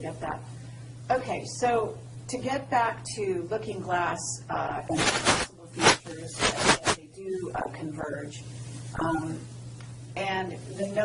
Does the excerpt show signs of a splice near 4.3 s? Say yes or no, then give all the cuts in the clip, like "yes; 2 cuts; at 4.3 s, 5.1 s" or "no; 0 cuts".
yes; 1 cut; at 4.3 s